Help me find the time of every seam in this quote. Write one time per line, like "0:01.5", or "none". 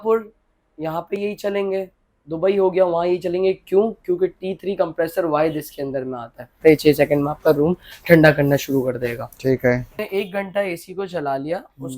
0:06.5
0:10.0